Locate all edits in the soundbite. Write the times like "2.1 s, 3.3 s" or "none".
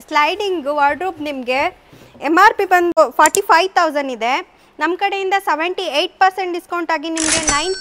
3.0 s